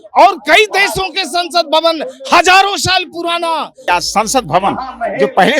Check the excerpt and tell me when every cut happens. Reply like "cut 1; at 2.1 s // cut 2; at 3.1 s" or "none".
cut 1; at 3.8 s